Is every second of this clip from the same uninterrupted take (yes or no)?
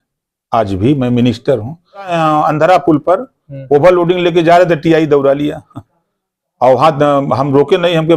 no